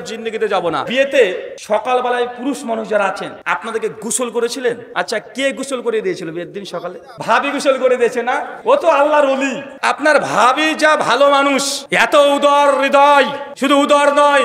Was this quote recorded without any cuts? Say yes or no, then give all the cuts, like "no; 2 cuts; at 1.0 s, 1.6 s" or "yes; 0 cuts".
no; 9 cuts; at 0.9 s, 1.5 s, 3.3 s, 4.9 s, 7.1 s, 8.5 s, 9.7 s, 11.8 s, 13.5 s